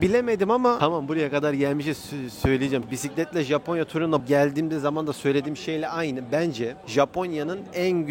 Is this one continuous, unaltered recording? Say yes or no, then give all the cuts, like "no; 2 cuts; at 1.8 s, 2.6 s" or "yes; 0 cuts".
no; 3 cuts; at 0.8 s, 2.9 s, 6.8 s